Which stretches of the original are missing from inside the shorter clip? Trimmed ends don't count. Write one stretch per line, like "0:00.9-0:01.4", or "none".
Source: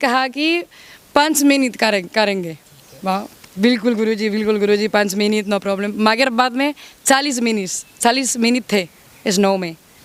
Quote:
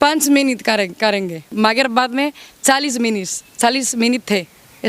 0:02.6-0:05.9